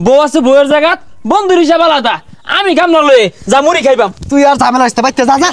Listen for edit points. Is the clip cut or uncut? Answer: uncut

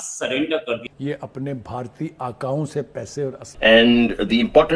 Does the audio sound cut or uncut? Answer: cut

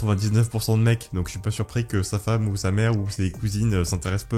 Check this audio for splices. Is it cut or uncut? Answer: uncut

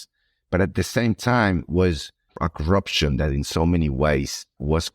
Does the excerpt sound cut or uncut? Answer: cut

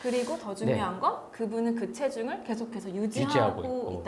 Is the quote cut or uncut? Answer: uncut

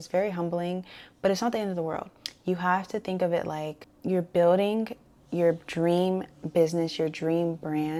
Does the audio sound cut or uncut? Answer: uncut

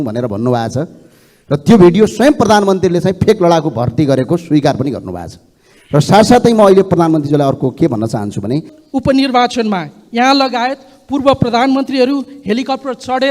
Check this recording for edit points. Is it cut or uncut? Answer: cut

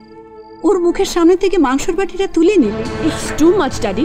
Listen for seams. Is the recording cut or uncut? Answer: cut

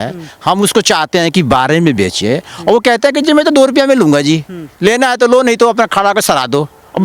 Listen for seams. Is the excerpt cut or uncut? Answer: uncut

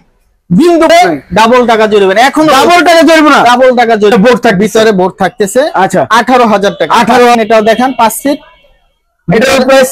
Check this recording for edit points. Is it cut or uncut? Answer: cut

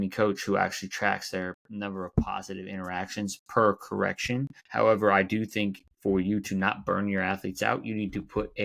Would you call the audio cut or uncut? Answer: cut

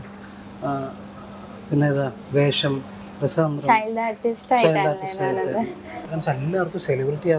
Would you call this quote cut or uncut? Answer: cut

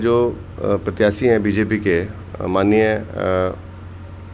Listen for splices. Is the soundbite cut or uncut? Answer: uncut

